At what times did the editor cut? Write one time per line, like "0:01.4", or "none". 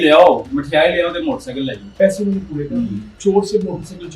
0:01.8
0:03.1